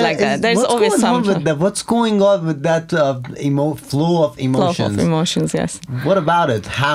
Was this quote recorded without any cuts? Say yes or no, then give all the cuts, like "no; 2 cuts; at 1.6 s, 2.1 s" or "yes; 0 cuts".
yes; 0 cuts